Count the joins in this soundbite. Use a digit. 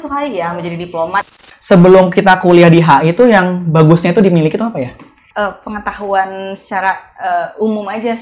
2